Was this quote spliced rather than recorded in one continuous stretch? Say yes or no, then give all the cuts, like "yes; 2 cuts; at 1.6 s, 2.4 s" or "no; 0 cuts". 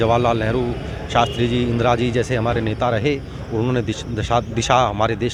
no; 0 cuts